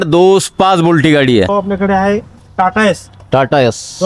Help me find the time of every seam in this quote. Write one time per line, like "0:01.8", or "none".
0:01.5